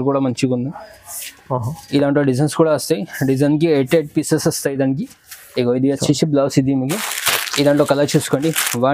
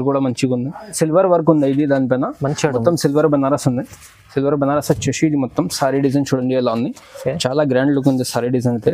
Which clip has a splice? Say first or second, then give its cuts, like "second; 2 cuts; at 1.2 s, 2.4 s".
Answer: second; 1 cut; at 0.9 s